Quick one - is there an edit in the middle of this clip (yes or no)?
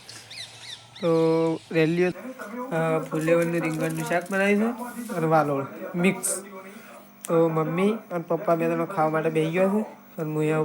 yes